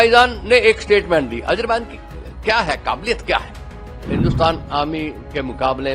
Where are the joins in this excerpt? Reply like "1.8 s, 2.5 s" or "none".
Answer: 4.0 s

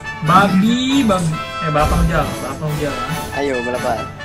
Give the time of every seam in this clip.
1.5 s

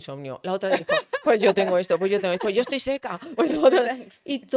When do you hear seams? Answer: none

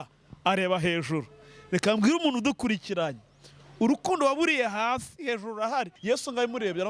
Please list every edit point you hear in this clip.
6.0 s

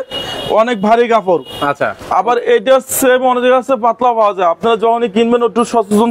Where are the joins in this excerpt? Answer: none

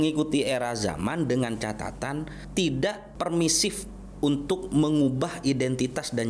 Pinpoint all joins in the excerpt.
2.4 s, 3.1 s

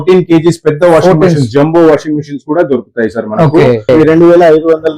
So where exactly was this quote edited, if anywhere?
3.9 s

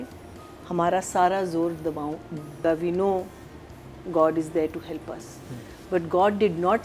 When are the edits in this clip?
2.6 s

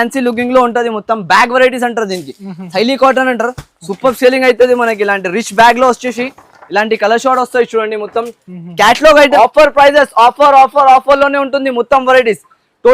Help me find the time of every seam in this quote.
9.3 s

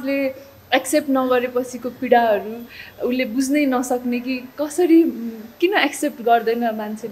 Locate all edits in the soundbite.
none

